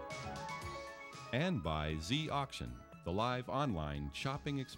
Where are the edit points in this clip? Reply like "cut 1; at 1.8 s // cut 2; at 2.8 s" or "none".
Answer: cut 1; at 1.1 s